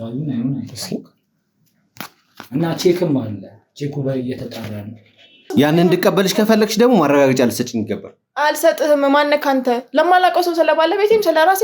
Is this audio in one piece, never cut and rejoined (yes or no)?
no